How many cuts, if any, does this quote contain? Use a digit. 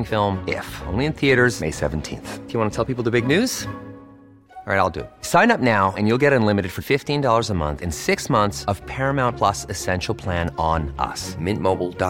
0